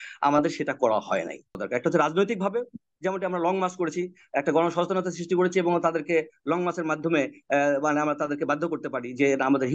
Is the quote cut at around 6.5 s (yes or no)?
no